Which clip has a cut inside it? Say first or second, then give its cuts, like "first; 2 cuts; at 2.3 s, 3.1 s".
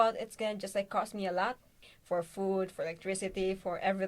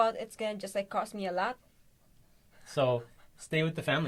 first; 1 cut; at 1.9 s